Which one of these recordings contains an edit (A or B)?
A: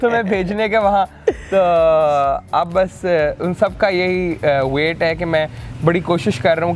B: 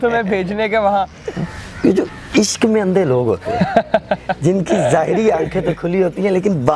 B